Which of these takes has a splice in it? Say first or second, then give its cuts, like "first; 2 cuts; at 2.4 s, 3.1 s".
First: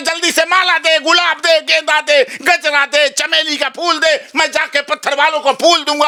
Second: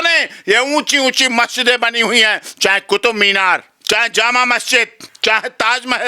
second; 2 cuts; at 3.7 s, 5.0 s